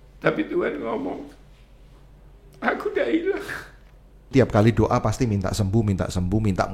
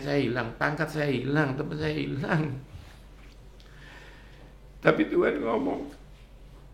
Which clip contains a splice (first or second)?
first